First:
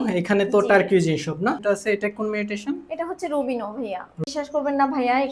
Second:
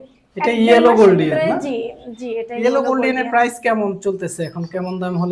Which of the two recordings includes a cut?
first; 2 cuts; at 1.6 s, 4.2 s

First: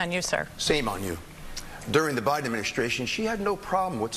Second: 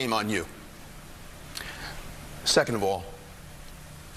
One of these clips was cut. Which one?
first; 1 cut; at 1.5 s

